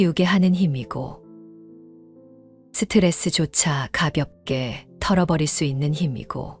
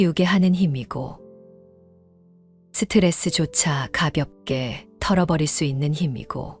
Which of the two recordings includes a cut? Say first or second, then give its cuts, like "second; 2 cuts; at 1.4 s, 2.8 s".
first; 2 cuts; at 1.2 s, 2.7 s